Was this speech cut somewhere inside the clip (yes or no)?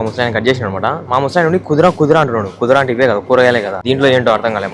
no